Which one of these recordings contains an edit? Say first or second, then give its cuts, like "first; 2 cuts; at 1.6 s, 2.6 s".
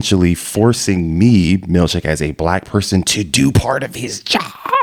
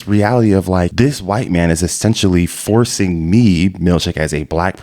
second; 1 cut; at 0.9 s